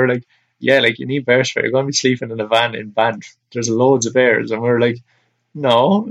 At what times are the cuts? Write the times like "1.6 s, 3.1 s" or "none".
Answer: none